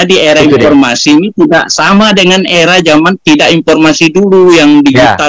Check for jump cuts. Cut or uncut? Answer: uncut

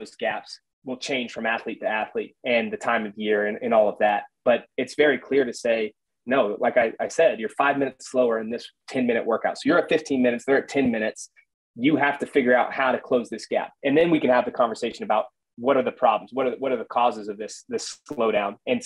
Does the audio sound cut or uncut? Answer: uncut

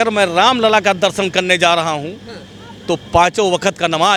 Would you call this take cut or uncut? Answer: uncut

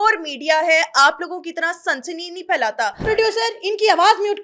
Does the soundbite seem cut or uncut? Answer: cut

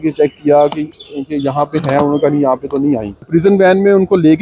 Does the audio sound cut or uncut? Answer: cut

